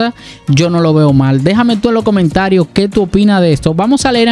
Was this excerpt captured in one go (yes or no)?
yes